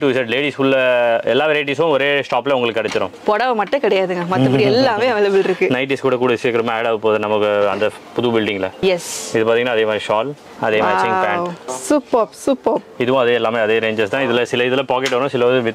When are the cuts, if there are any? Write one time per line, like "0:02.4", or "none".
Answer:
none